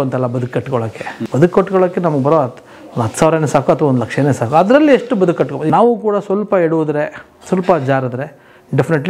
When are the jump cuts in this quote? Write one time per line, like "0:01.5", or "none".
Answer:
0:01.2
0:05.6